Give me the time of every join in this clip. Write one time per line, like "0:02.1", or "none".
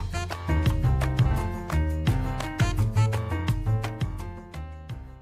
0:03.2